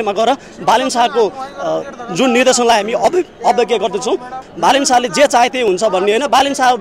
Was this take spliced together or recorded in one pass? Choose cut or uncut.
cut